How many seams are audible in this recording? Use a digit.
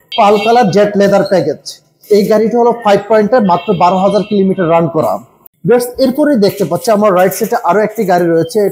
1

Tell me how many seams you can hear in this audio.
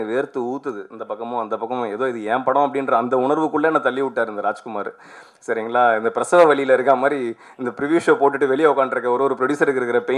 0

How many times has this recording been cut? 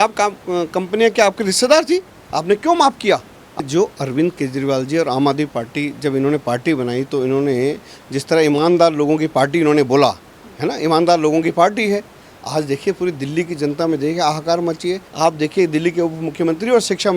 2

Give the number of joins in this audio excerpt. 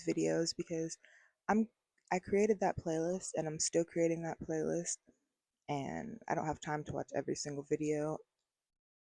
0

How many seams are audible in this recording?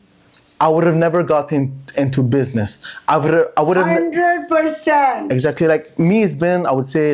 0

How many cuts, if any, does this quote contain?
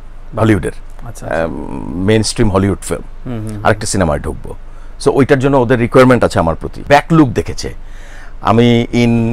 1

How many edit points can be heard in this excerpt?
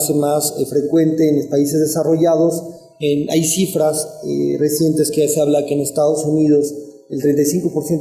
1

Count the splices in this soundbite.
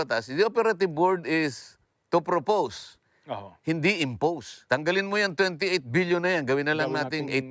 1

